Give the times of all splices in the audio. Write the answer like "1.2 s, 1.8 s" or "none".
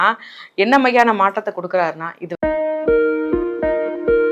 2.3 s